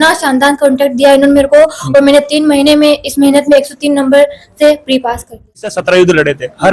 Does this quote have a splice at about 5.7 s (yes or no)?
yes